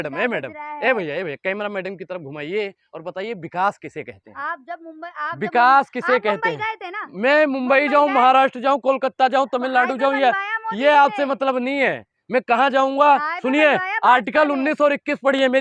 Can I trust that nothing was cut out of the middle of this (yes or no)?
yes